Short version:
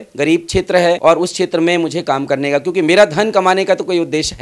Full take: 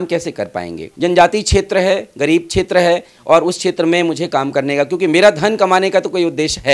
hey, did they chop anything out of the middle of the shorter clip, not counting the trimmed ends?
yes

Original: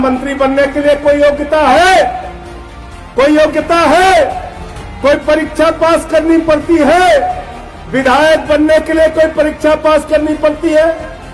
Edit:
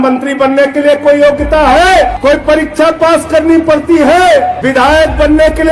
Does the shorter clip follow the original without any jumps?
no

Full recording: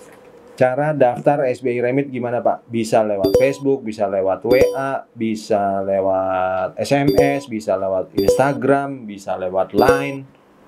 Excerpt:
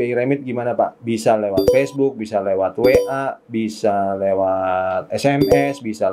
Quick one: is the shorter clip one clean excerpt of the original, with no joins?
yes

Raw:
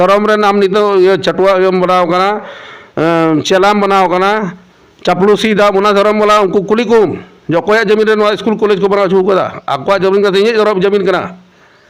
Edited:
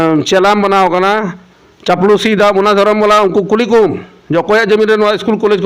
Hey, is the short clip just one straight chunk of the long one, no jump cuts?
yes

